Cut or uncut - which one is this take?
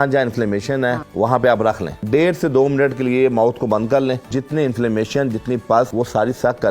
cut